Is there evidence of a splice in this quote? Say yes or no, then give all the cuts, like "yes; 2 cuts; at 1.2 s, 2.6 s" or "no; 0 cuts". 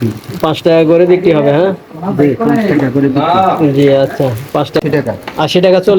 yes; 1 cut; at 4.8 s